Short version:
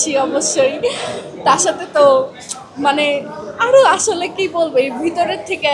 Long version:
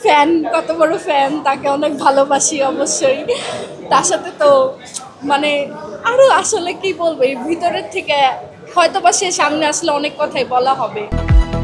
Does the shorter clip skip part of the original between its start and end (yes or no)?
no